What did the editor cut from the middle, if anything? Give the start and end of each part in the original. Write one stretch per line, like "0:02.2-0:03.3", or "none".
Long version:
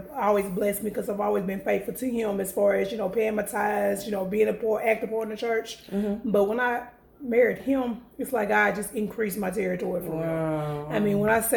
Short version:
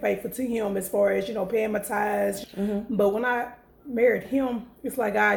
0:04.0-0:05.8